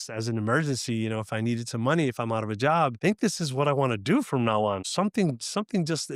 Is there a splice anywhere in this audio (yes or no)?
yes